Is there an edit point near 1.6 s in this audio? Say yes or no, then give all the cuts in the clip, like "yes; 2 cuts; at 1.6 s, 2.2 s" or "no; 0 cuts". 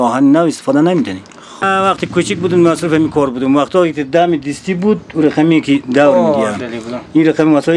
yes; 1 cut; at 1.6 s